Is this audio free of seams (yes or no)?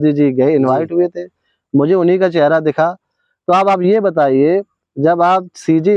yes